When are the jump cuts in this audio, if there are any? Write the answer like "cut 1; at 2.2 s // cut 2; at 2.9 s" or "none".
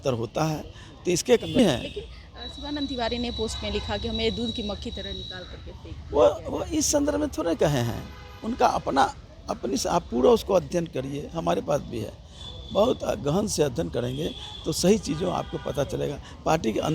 cut 1; at 1.4 s